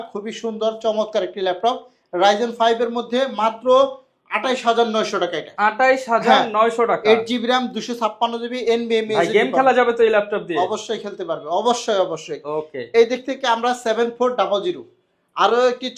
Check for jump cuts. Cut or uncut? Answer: uncut